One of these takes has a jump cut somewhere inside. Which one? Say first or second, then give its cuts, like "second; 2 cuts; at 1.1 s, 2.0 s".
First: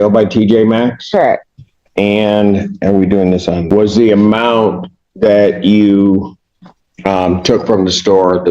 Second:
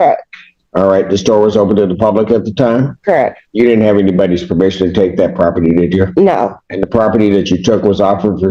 first; 1 cut; at 3.6 s